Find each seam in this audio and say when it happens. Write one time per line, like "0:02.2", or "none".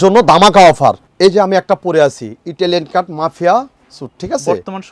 none